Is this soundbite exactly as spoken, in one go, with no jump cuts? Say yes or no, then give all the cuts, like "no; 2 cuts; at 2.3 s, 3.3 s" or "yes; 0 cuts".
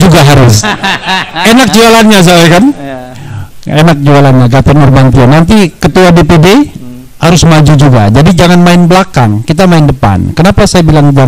yes; 0 cuts